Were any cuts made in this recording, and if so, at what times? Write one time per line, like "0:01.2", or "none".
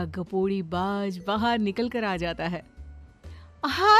none